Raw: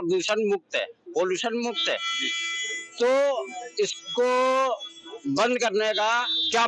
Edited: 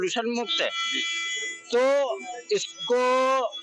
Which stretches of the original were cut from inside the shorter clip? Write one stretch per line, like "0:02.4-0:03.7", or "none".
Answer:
none